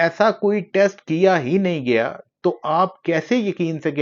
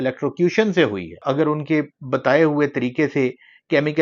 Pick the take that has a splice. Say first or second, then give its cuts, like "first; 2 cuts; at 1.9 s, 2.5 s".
second; 1 cut; at 1.2 s